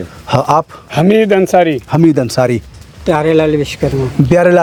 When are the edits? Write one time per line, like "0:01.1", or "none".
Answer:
none